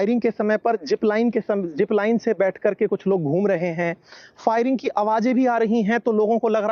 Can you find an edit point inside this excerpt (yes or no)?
no